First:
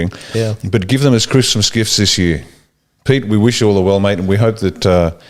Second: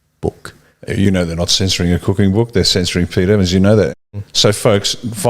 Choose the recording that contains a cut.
second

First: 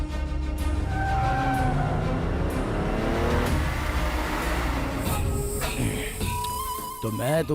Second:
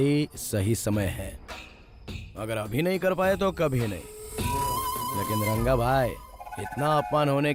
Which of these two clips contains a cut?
first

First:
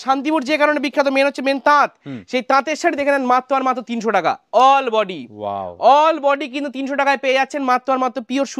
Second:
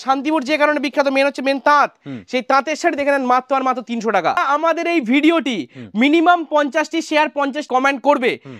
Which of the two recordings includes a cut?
second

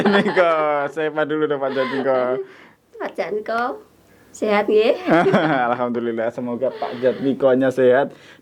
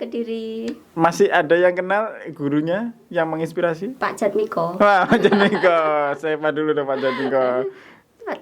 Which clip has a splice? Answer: second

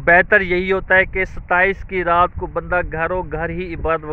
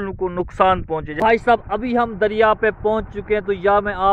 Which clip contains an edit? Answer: second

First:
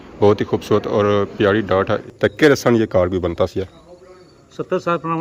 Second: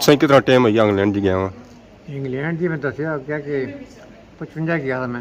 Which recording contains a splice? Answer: first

